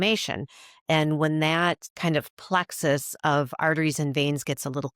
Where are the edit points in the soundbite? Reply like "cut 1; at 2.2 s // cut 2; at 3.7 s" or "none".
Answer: cut 1; at 1.9 s